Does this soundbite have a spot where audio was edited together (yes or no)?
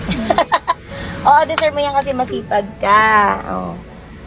no